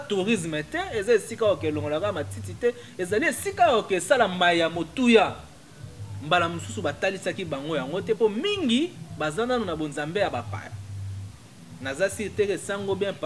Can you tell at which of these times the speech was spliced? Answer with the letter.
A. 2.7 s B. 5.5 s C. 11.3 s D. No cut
D